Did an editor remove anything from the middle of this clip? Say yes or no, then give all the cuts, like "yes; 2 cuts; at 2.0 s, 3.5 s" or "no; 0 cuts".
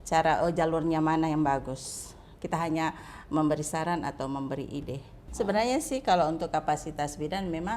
yes; 1 cut; at 5.2 s